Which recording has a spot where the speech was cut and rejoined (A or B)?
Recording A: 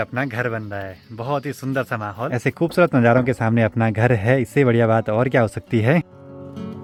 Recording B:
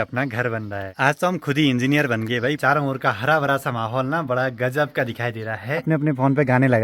B